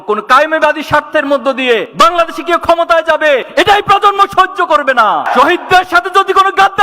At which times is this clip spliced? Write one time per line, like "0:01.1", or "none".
0:05.3